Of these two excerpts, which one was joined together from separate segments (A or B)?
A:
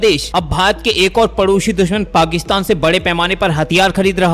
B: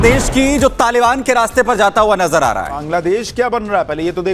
B